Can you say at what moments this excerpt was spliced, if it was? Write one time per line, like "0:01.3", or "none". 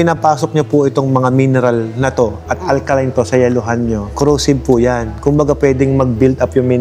none